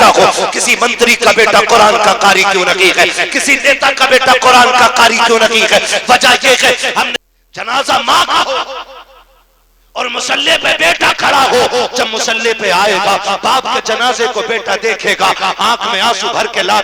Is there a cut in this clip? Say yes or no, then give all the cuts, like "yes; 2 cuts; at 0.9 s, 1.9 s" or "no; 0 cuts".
yes; 1 cut; at 7.1 s